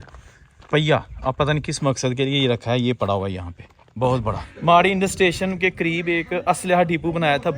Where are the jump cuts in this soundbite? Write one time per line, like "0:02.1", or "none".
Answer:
0:04.5